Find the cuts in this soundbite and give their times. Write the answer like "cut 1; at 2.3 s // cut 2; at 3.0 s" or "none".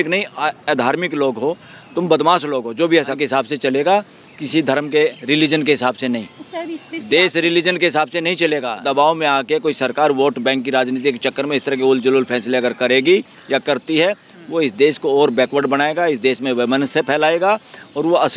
cut 1; at 3.2 s // cut 2; at 8.9 s